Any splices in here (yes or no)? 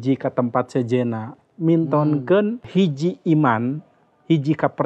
yes